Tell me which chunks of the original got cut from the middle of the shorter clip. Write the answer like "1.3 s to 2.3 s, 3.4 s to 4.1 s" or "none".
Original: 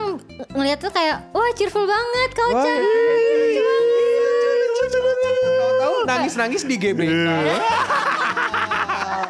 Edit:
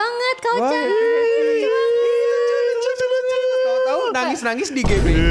none